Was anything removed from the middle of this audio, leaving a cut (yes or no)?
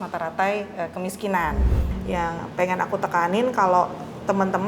yes